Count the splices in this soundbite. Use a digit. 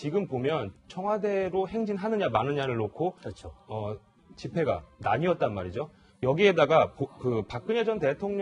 1